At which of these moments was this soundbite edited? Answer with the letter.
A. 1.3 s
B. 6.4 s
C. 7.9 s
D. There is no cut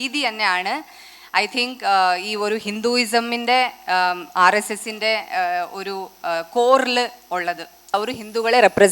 C